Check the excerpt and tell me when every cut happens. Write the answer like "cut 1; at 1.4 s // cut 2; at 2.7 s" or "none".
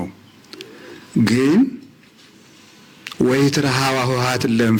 none

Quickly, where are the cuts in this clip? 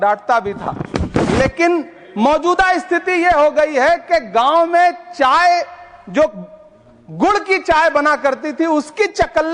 none

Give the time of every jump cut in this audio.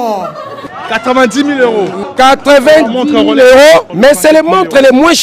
cut 1; at 2.0 s // cut 2; at 3.9 s

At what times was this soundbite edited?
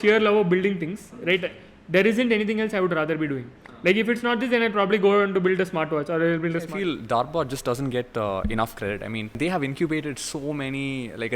cut 1; at 6.7 s // cut 2; at 9.4 s

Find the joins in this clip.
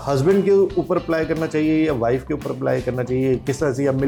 none

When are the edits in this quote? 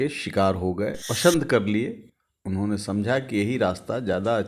cut 1; at 1.1 s

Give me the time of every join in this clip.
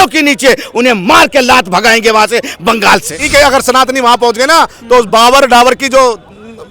cut 1; at 3.2 s

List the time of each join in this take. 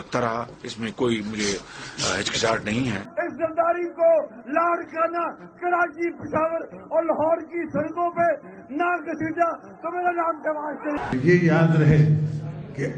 cut 1; at 3.1 s // cut 2; at 11.0 s

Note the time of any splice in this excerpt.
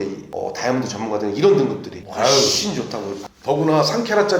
cut 1; at 3.2 s

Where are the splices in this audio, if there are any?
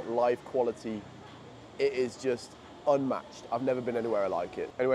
none

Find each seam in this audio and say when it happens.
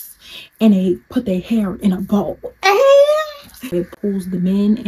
cut 1; at 1.0 s // cut 2; at 3.7 s

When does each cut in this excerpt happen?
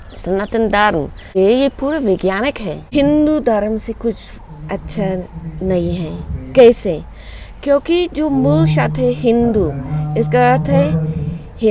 cut 1; at 1.3 s // cut 2; at 2.7 s

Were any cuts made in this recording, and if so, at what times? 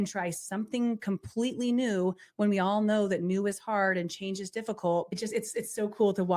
cut 1; at 5.1 s

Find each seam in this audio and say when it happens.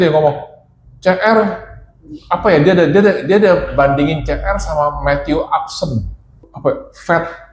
cut 1; at 6.4 s

